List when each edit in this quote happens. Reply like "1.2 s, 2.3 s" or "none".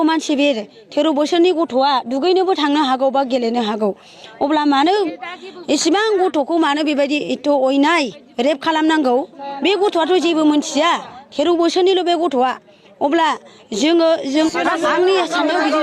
14.5 s